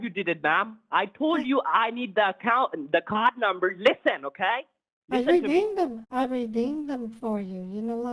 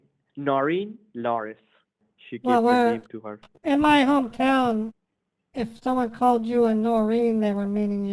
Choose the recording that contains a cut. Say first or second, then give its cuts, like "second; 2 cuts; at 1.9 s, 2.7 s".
second; 1 cut; at 2.1 s